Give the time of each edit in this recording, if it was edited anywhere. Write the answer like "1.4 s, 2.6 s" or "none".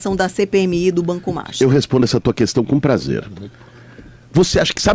none